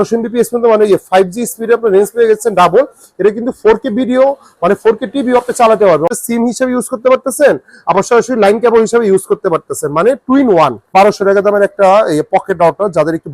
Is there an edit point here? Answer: yes; 2 cuts; at 6.1 s, 10.9 s

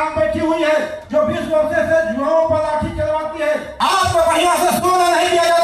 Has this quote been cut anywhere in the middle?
yes; 2 cuts; at 1.0 s, 3.7 s

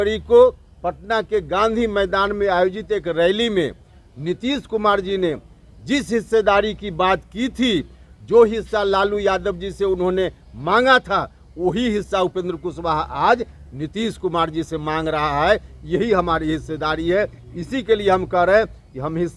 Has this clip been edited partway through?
no; 0 cuts

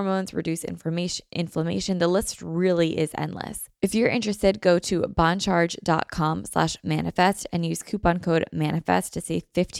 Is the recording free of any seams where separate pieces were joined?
no; 1 cut; at 3.6 s

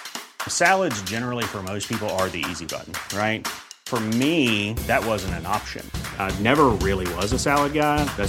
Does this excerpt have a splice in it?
no; 0 cuts

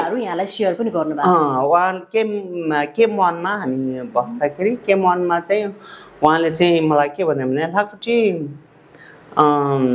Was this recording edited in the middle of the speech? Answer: no; 0 cuts

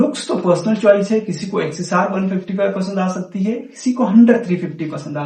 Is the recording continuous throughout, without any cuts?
yes; 0 cuts

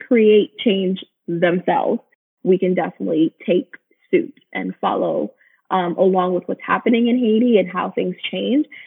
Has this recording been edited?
yes; 1 cut; at 2.2 s

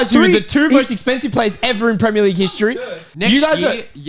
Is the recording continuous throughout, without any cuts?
no; 1 cut; at 2.8 s

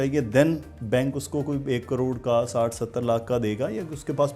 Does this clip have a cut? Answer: no; 0 cuts

